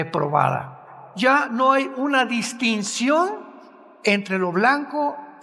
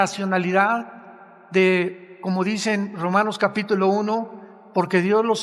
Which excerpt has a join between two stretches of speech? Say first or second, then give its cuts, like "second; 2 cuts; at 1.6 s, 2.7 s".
first; 1 cut; at 1.1 s